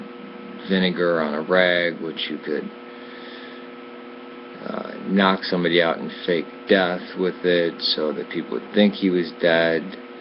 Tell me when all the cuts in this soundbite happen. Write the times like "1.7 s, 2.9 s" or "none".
none